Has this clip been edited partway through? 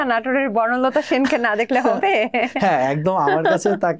no; 0 cuts

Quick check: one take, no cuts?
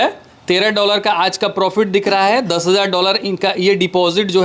yes; 0 cuts

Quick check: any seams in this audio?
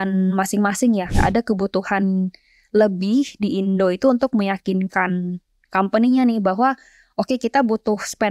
yes; 1 cut; at 1.1 s

